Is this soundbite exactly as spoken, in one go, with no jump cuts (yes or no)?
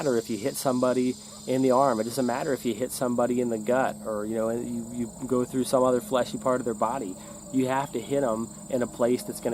yes